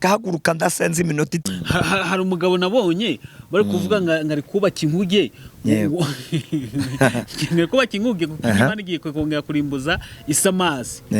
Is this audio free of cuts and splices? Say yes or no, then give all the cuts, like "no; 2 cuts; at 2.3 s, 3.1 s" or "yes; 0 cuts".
no; 1 cut; at 1.5 s